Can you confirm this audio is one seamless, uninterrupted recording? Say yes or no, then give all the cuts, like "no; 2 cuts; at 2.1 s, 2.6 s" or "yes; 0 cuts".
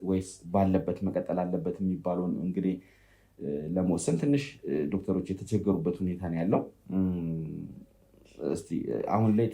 yes; 0 cuts